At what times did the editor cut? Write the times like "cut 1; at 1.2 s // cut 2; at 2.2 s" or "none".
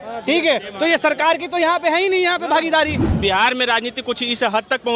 cut 1; at 3.1 s